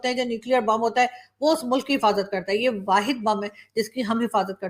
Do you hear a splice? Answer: no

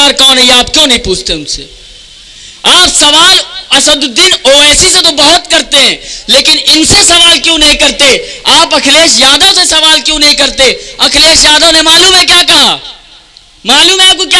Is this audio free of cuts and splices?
yes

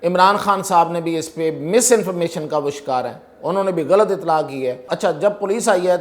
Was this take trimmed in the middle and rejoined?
yes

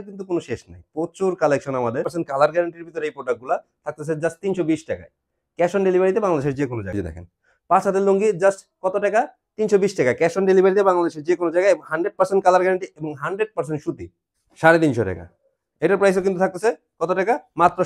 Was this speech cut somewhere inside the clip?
yes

